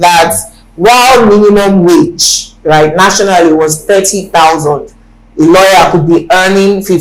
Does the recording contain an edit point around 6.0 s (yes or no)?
no